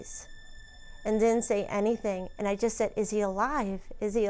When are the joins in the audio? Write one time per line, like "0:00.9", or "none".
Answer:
0:02.3